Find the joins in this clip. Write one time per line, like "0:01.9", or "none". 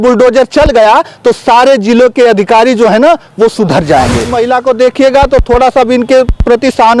0:04.2